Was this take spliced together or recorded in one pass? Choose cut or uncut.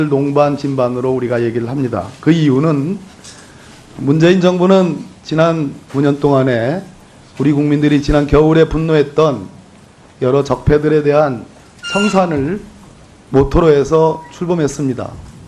uncut